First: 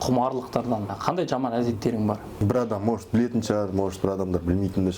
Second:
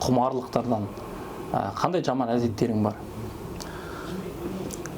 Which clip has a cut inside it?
first; 2 cuts; at 1.0 s, 2.3 s

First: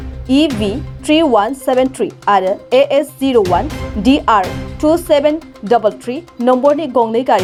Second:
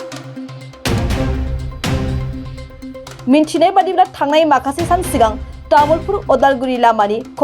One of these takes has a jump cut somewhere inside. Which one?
second; 1 cut; at 2.6 s

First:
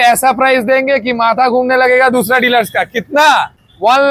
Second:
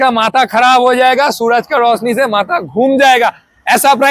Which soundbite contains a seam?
first; 1 cut; at 3.1 s

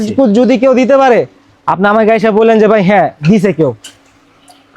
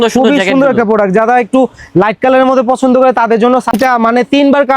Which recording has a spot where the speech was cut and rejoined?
second; 1 cut; at 3.8 s

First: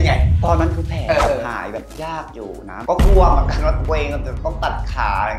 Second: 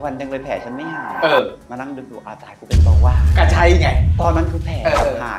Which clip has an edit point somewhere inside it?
first; 1 cut; at 2.7 s

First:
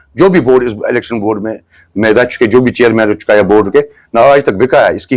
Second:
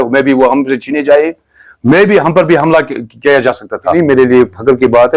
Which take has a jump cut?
second; 1 cut; at 3.9 s

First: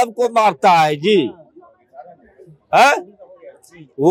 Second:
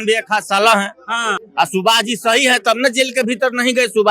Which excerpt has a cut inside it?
second; 1 cut; at 1.4 s

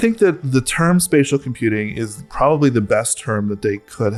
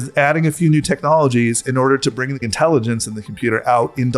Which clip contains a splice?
second; 1 cut; at 2.5 s

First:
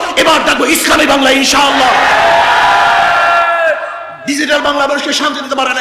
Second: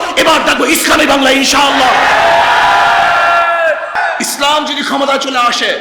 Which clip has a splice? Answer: second; 1 cut; at 4.0 s

